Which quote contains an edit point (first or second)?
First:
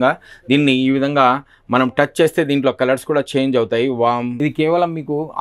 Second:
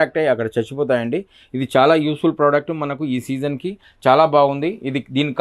first